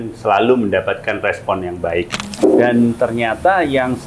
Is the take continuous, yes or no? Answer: no